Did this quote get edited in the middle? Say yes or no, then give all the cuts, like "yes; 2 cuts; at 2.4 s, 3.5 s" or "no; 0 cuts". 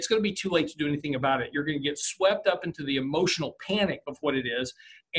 no; 0 cuts